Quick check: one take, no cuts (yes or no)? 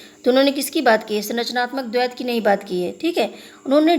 yes